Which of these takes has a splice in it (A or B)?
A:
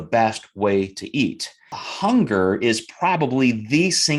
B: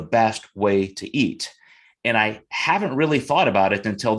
A